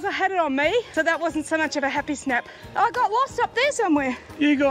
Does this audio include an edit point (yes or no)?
yes